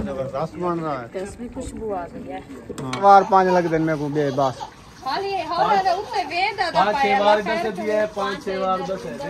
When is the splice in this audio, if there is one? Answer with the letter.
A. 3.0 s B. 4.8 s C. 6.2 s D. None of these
A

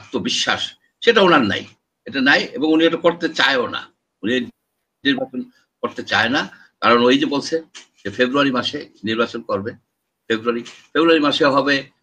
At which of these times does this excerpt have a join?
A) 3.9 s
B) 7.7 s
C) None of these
C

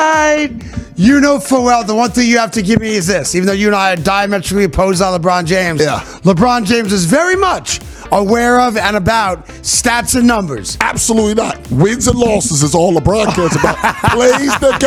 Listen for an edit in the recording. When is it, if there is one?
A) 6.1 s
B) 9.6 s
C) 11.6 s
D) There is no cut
D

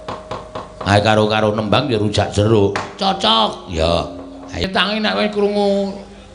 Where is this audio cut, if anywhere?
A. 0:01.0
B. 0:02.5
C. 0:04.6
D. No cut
C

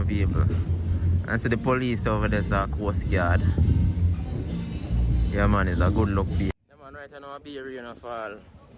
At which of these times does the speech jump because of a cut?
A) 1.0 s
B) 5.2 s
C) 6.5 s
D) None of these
C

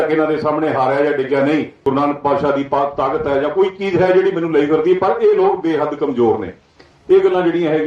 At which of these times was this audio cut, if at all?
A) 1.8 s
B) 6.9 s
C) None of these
A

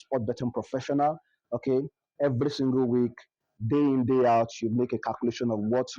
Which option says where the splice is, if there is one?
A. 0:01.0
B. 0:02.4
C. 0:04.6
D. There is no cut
D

